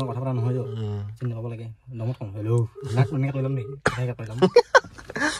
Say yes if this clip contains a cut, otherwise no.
no